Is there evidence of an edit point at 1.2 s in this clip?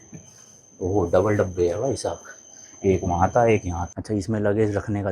no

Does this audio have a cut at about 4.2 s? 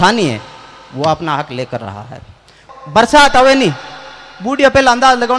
no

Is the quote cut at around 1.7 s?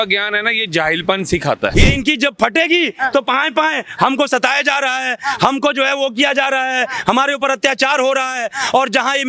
yes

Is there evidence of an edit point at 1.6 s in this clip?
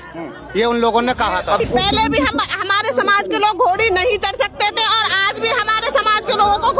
yes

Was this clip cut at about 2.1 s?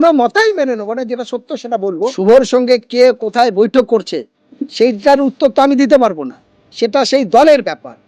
yes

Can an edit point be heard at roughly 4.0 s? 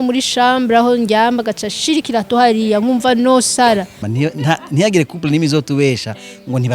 yes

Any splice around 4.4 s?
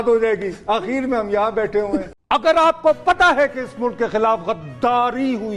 no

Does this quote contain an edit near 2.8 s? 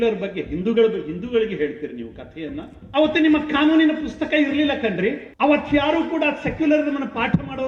yes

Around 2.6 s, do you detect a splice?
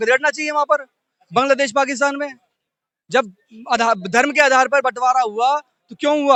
no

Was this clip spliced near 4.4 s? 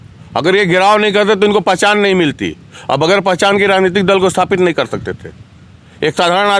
no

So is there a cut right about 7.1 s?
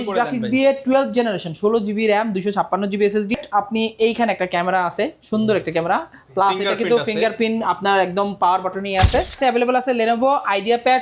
no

